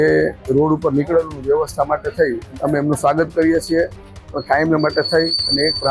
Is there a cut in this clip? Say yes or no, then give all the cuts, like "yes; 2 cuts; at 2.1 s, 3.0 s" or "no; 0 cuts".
yes; 1 cut; at 2.5 s